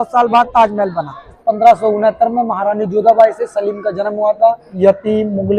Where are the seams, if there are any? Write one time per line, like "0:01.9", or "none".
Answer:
0:01.4
0:04.7